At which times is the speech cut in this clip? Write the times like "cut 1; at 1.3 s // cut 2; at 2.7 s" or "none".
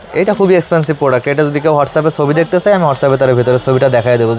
none